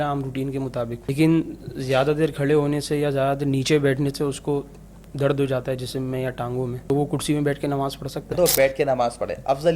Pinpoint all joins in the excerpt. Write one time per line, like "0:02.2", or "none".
0:01.0
0:06.9
0:08.3